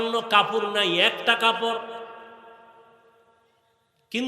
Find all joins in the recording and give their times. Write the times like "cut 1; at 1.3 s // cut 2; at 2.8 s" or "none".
none

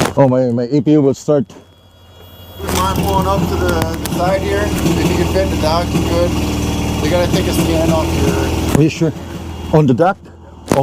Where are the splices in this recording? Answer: cut 1; at 2.7 s

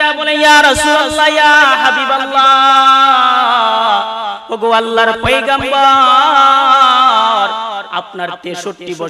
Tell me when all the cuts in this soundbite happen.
none

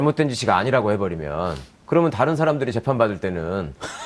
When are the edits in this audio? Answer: cut 1; at 2.9 s

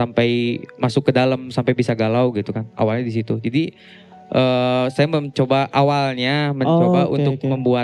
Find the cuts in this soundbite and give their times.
none

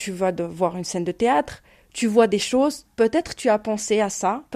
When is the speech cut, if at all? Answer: none

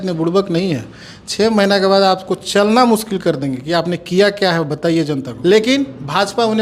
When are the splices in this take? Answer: cut 1; at 5.3 s

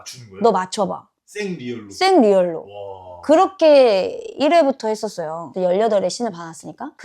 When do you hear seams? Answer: cut 1; at 5.5 s

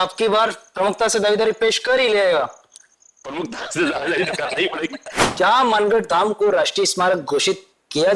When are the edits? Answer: cut 1; at 5.3 s

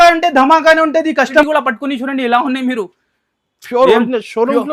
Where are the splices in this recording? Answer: cut 1; at 1.4 s

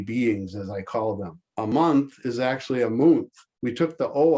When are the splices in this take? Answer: cut 1; at 1.7 s

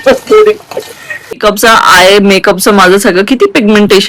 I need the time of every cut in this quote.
cut 1; at 1.4 s

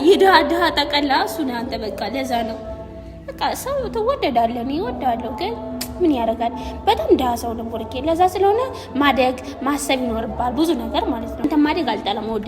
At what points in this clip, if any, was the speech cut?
cut 1; at 11.4 s

